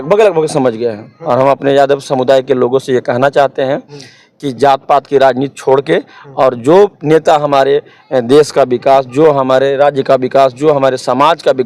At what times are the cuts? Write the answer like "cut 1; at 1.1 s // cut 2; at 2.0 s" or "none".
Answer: cut 1; at 1.1 s